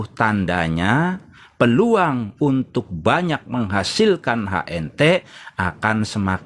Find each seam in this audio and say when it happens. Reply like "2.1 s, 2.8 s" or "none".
none

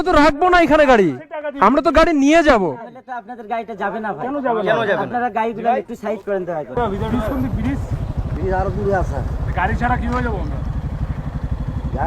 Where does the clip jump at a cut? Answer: 6.7 s

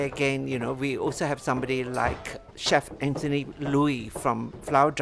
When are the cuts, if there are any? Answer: 2.4 s

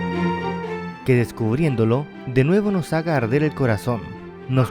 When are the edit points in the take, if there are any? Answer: 0.9 s

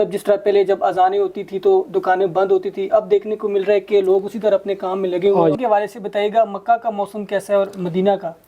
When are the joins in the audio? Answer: 5.6 s

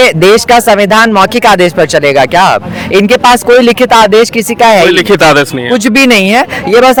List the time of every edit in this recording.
none

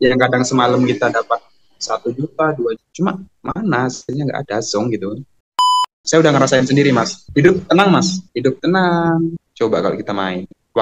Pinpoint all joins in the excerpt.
5.9 s, 7.2 s, 8.2 s, 9.4 s

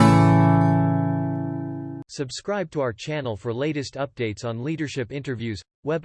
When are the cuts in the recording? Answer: 2.0 s

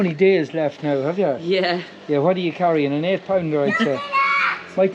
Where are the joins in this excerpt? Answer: none

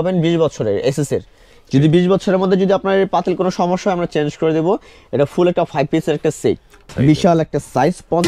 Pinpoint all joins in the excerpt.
6.9 s

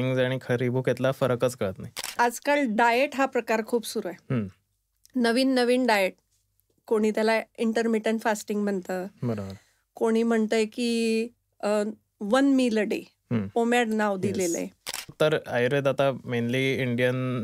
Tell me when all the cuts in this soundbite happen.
2.1 s, 15.1 s

